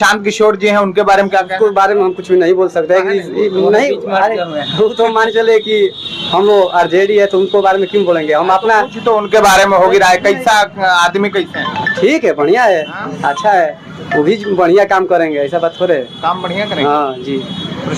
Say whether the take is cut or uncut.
uncut